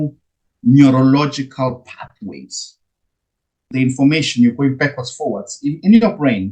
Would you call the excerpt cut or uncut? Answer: cut